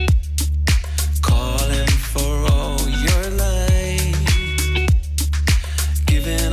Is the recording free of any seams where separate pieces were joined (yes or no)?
yes